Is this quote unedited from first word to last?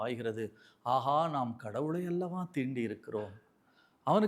yes; 0 cuts

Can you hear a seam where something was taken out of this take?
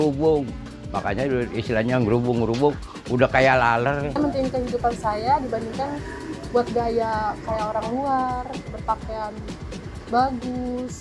yes; 1 cut; at 4.2 s

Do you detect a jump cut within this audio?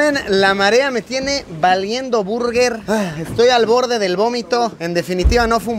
no; 0 cuts

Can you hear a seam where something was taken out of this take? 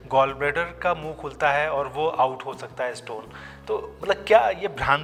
no; 0 cuts

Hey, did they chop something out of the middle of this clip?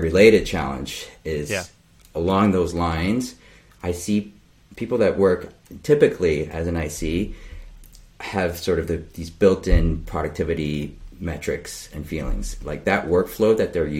yes; 1 cut; at 1.9 s

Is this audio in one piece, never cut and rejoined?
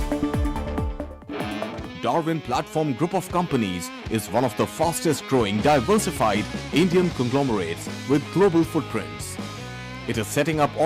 no; 1 cut; at 1.3 s

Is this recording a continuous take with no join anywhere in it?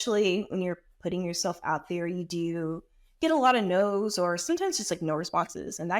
yes; 0 cuts

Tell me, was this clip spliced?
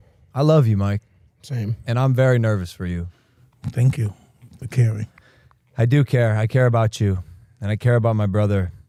no; 0 cuts

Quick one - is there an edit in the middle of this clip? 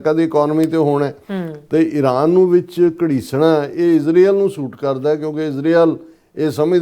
no; 0 cuts

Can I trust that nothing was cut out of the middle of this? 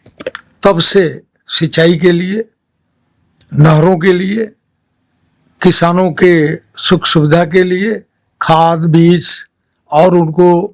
yes; 0 cuts

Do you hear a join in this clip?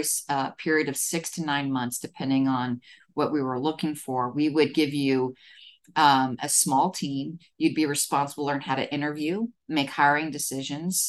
no; 0 cuts

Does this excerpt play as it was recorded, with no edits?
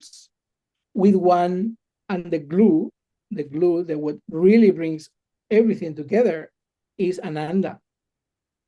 yes; 0 cuts

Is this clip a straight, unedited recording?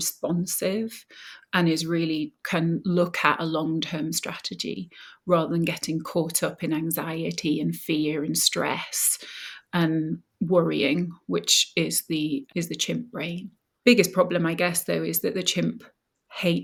yes; 0 cuts

